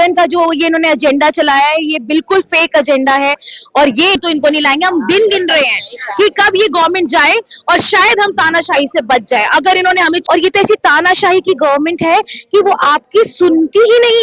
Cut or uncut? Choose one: cut